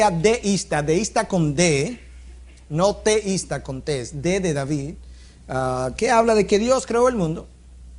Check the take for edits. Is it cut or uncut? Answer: cut